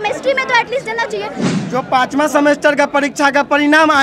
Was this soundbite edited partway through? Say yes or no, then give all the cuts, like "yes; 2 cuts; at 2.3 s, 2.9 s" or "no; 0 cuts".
yes; 1 cut; at 1.4 s